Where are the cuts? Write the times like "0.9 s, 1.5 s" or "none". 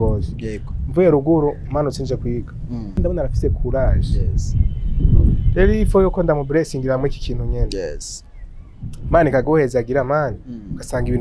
3.0 s